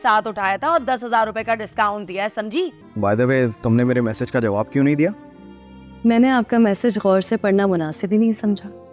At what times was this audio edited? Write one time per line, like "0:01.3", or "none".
0:02.8